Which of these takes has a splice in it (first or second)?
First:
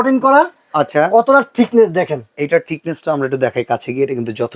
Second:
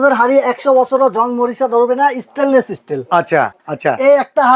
second